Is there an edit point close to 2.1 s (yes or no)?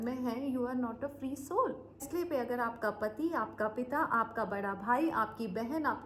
yes